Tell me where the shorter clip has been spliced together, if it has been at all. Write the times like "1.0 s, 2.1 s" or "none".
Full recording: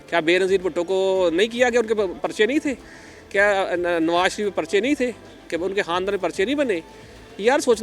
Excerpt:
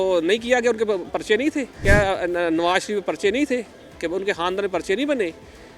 1.7 s